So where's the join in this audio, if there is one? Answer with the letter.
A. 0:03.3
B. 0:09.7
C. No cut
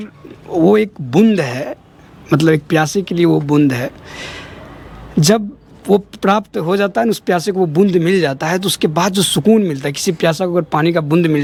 C